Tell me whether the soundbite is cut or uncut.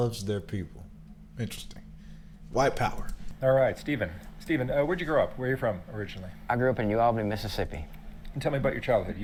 uncut